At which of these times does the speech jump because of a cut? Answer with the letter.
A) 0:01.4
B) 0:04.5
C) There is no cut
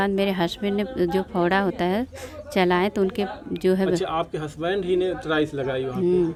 C